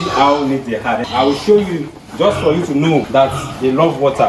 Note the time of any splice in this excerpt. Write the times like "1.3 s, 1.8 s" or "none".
1.0 s, 3.1 s